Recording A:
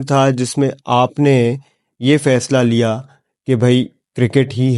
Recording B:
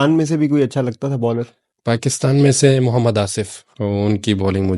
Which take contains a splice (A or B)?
B